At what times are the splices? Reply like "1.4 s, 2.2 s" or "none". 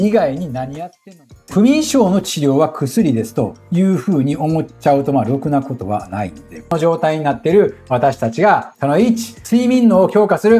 6.7 s